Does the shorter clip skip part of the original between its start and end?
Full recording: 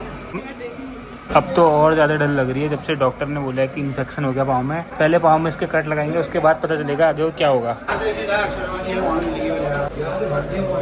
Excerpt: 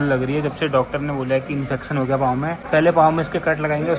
no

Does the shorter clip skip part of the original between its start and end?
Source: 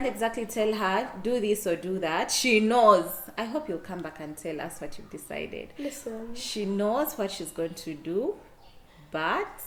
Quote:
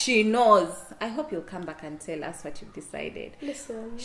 no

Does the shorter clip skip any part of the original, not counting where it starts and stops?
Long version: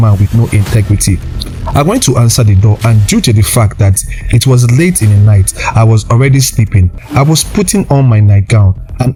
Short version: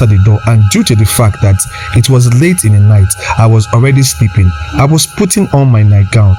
no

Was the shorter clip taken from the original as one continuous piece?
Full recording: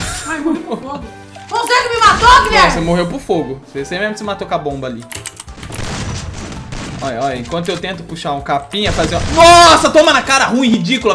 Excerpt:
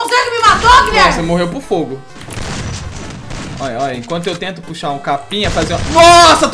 no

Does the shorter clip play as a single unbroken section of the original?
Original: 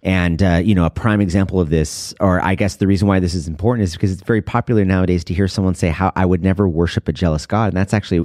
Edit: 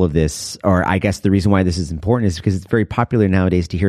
yes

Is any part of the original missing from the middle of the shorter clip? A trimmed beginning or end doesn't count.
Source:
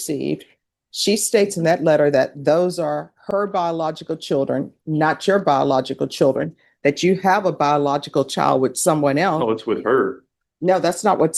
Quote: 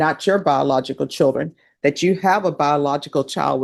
no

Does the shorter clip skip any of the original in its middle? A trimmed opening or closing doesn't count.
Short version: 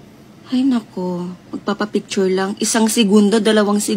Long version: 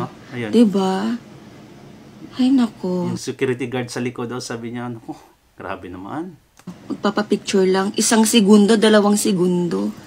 yes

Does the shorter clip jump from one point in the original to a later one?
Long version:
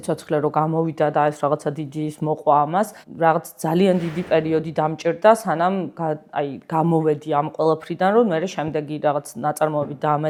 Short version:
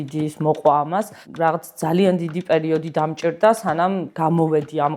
yes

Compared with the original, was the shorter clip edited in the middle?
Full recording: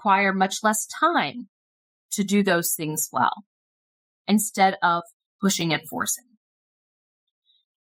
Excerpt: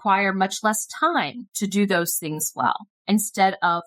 yes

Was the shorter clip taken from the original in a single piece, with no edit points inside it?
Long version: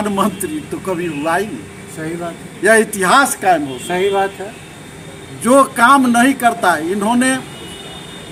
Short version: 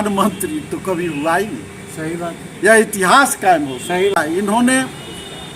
no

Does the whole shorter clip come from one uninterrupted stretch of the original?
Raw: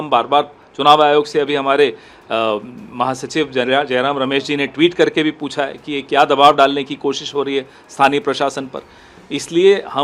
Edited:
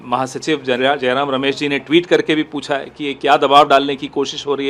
yes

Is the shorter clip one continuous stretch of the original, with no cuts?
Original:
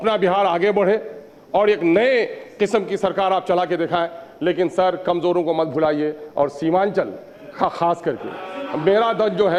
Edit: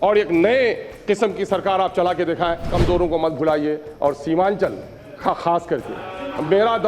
no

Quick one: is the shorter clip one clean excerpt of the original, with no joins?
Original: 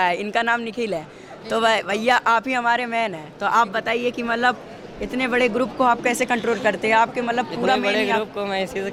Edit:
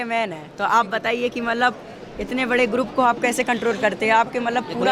yes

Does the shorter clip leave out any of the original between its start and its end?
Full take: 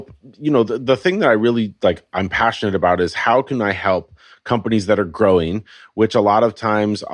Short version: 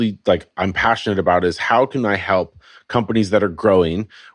no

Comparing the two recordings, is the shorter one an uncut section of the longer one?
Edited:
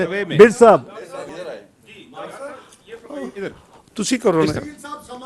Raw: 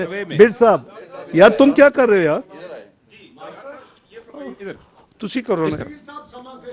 no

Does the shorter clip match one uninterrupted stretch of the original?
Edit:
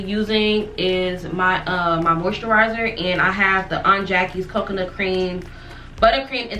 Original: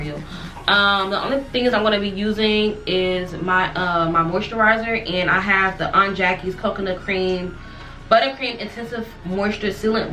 yes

